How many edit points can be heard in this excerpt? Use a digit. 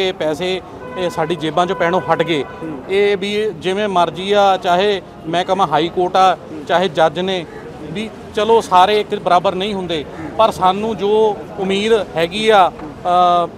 0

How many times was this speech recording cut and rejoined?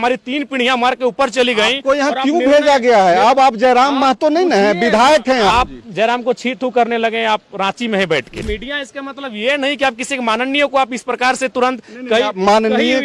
2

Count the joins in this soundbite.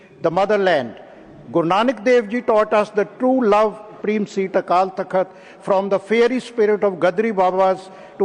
1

